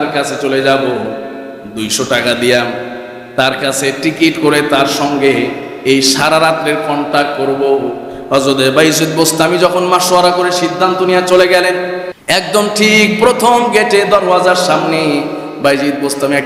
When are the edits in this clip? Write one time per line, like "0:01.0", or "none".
0:12.1